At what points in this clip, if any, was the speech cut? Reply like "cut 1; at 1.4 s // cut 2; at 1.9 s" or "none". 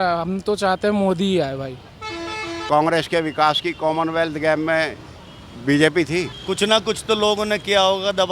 cut 1; at 2.5 s // cut 2; at 6.3 s